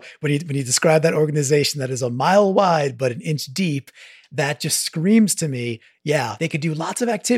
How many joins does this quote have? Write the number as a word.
one